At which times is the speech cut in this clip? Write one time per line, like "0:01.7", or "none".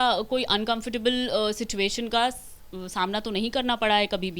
none